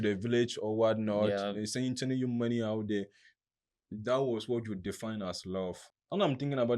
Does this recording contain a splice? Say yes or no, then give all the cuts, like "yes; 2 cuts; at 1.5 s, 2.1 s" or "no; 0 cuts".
yes; 1 cut; at 5.9 s